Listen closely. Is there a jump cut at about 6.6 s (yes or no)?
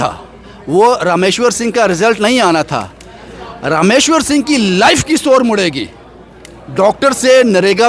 no